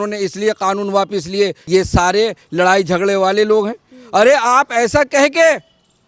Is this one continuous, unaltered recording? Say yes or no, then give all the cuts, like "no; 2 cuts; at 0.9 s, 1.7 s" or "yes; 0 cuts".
no; 1 cut; at 1.6 s